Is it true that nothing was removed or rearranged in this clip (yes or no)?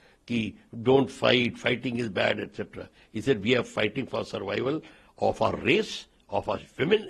yes